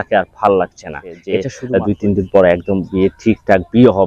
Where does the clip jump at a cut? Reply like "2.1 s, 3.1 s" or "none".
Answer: 1.5 s